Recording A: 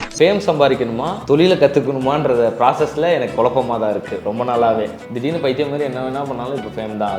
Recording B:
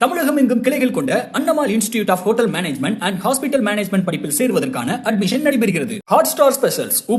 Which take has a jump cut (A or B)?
A